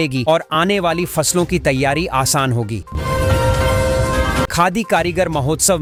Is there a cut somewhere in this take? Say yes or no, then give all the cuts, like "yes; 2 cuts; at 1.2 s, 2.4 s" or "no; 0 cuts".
no; 0 cuts